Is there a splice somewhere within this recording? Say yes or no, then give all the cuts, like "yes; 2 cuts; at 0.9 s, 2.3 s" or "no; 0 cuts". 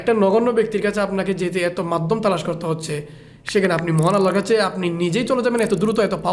no; 0 cuts